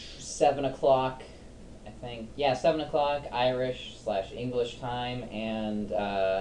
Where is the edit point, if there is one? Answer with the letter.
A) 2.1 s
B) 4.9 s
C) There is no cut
C